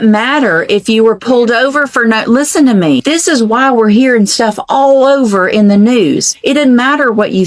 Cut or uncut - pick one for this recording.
cut